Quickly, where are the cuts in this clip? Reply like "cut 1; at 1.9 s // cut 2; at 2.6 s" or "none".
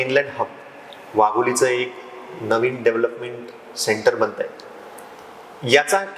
none